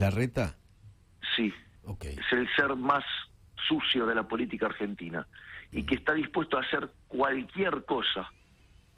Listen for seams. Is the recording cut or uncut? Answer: uncut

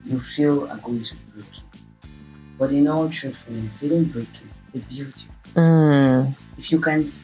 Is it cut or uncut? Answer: uncut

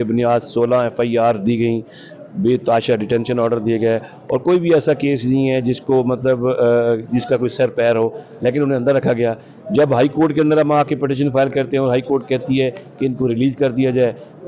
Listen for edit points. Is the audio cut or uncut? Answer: uncut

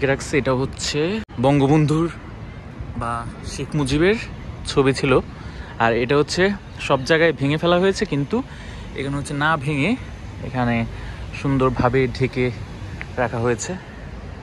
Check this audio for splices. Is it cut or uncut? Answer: cut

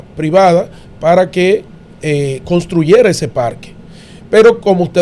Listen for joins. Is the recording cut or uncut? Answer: uncut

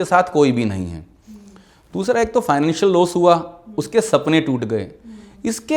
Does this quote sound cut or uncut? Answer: uncut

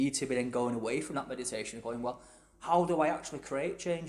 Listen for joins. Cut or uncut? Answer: uncut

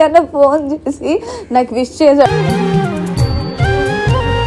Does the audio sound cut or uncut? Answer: uncut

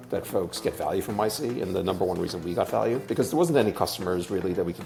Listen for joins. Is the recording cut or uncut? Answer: uncut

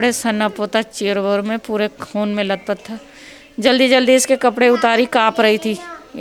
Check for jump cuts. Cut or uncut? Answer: uncut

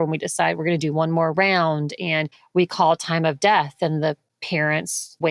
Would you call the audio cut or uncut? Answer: uncut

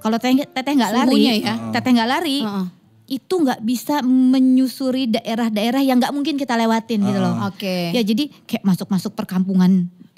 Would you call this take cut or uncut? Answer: uncut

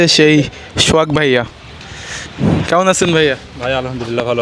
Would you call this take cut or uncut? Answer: uncut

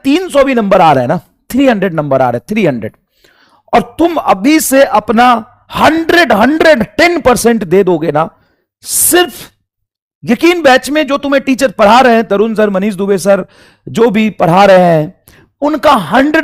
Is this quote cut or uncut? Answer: uncut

